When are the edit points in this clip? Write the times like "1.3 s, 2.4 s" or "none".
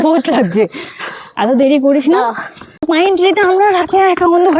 2.9 s

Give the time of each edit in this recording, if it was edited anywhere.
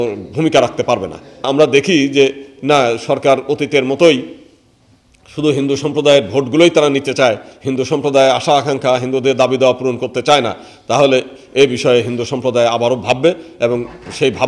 1.5 s

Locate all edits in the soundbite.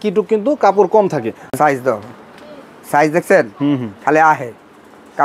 1.5 s

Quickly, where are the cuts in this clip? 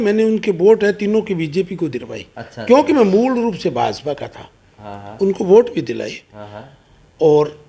none

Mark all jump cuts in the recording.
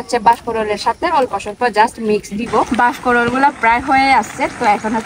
2.7 s

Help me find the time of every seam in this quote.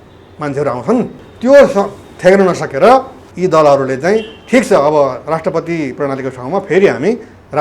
1.2 s, 3.2 s

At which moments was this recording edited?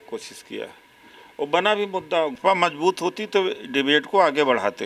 2.4 s

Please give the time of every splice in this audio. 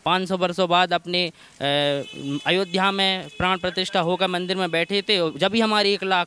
none

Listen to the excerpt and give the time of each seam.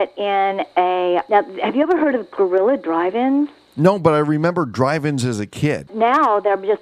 1.2 s, 3.6 s, 5.9 s

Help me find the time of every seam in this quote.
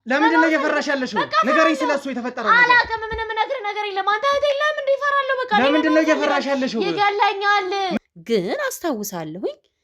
8.0 s

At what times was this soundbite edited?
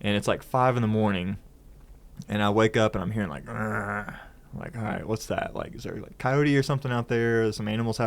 none

